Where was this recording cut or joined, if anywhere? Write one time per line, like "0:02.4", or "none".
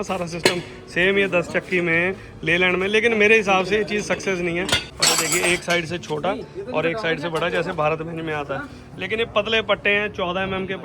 0:04.9